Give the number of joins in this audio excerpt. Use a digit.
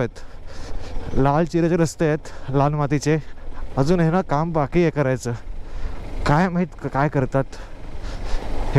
0